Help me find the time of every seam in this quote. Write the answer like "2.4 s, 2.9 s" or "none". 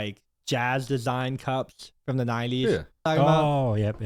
3.1 s